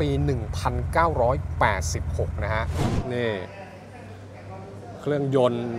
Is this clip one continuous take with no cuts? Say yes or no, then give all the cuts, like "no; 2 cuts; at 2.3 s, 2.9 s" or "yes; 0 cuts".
no; 1 cut; at 2.8 s